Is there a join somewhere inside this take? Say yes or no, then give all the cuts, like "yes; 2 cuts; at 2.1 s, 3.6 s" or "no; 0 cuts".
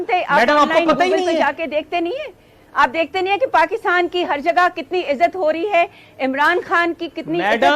no; 0 cuts